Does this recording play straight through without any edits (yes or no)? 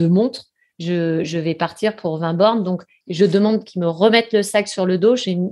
no